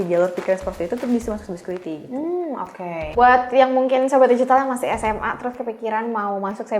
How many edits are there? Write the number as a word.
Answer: one